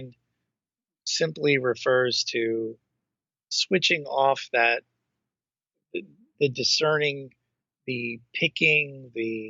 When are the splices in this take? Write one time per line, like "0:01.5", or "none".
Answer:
none